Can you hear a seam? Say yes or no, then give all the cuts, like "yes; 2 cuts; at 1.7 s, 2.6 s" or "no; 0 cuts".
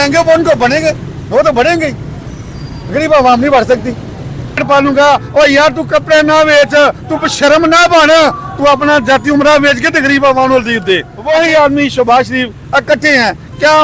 yes; 2 cuts; at 4.6 s, 11.1 s